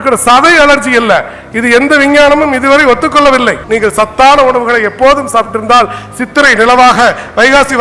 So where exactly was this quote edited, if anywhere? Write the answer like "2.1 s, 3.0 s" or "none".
3.6 s